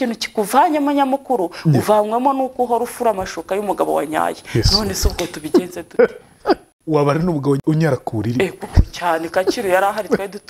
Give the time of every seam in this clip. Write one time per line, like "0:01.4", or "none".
0:06.7
0:07.6